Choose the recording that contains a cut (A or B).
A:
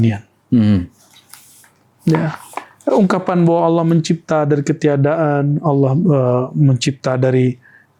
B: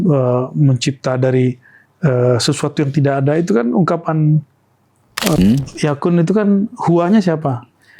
B